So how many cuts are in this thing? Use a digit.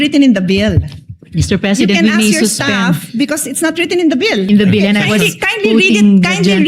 1